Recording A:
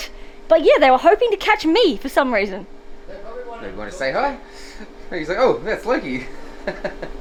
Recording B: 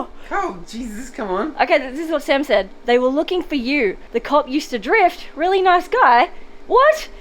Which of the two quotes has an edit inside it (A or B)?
B